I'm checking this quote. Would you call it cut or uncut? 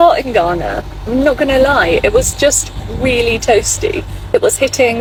uncut